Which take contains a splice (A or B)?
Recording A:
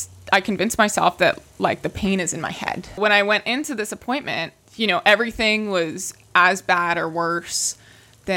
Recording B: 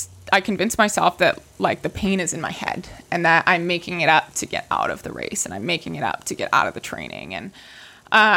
A